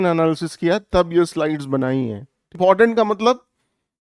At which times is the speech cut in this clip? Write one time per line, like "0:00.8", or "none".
0:02.6